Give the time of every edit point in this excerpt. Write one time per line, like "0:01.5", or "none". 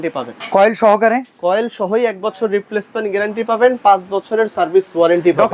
none